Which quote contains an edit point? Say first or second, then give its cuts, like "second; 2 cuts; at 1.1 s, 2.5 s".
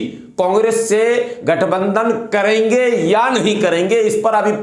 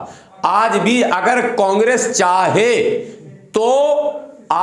first; 1 cut; at 2.9 s